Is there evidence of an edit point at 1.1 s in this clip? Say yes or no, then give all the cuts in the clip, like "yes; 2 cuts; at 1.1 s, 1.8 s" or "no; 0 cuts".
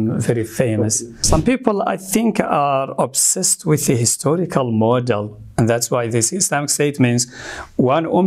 yes; 1 cut; at 1.1 s